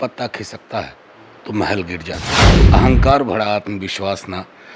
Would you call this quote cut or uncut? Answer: cut